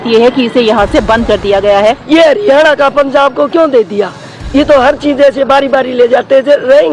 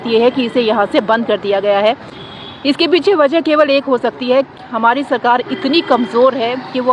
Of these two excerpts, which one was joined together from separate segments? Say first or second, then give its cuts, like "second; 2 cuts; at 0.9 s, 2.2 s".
first; 1 cut; at 2.0 s